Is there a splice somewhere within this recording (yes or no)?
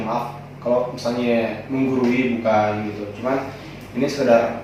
no